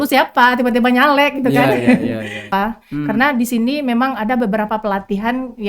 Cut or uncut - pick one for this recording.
cut